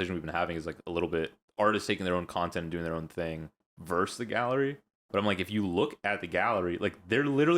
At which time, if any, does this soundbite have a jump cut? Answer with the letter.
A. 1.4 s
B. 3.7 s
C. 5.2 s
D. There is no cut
A